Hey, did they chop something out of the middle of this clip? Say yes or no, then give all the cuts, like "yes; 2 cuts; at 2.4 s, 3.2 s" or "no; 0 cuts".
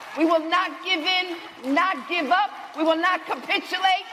no; 0 cuts